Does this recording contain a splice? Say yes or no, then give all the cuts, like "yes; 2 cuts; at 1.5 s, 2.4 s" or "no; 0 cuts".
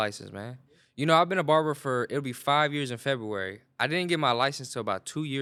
no; 0 cuts